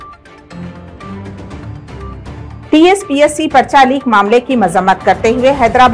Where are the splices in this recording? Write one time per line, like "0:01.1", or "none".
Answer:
none